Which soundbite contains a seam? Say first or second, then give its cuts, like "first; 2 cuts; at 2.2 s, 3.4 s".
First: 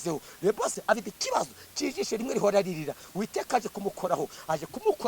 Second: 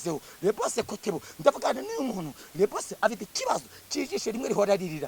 first; 1 cut; at 1.0 s